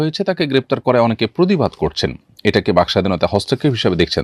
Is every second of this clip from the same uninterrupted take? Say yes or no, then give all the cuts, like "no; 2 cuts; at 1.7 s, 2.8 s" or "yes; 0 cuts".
yes; 0 cuts